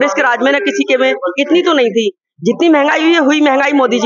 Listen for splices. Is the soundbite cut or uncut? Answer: uncut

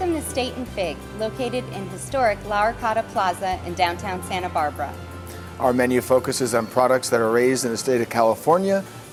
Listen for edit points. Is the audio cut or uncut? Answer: uncut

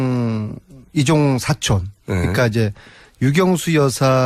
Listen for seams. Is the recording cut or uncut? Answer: cut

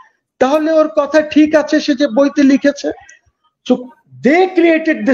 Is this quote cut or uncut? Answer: uncut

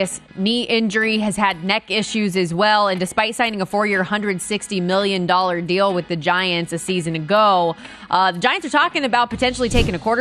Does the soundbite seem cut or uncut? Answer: uncut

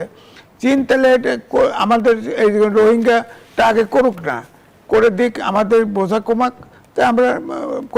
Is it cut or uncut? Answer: uncut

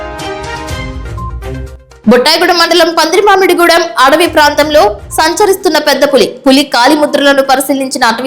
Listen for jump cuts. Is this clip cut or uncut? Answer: cut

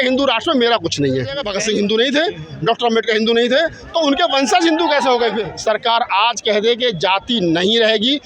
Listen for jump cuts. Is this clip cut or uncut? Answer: cut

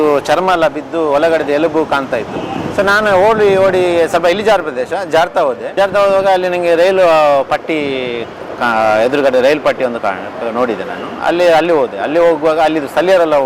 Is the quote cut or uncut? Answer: uncut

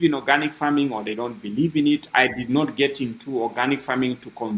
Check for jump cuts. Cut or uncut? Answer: uncut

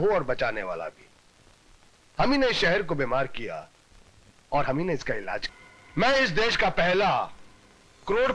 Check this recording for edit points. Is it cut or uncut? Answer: uncut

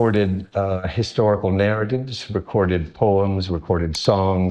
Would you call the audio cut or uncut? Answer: uncut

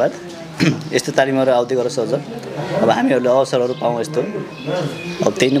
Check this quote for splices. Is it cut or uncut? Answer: uncut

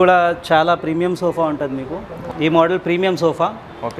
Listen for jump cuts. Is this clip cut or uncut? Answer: cut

